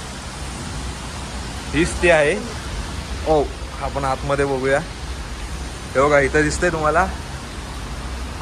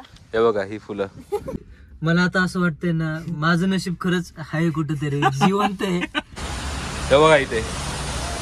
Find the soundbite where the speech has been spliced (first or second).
second